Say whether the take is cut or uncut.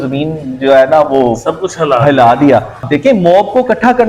cut